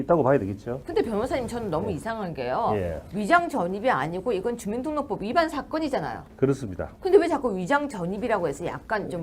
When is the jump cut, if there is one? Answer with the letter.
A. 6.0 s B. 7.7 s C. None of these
B